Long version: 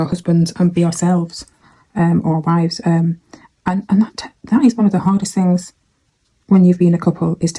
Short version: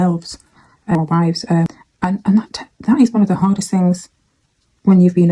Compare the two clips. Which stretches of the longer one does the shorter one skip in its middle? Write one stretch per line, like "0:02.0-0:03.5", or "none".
0:02.0-0:02.3
0:03.0-0:03.3